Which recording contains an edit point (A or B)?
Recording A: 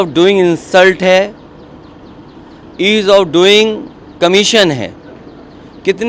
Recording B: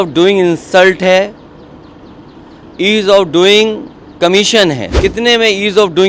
B